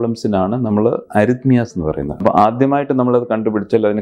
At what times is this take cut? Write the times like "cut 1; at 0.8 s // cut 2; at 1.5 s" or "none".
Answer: cut 1; at 2.2 s